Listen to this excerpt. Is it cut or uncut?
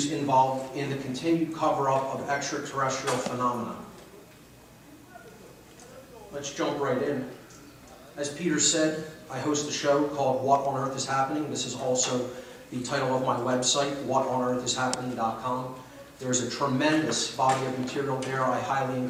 uncut